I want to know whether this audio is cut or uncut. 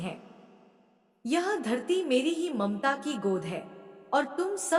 uncut